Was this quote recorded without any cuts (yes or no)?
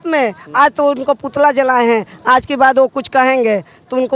yes